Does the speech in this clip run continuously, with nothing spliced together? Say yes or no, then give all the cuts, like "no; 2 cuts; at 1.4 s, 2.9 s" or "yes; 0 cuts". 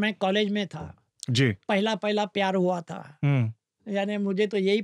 yes; 0 cuts